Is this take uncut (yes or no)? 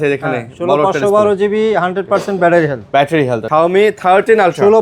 no